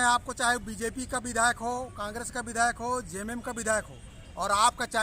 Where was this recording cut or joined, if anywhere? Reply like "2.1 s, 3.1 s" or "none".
none